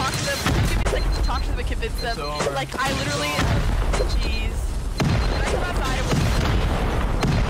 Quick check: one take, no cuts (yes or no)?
yes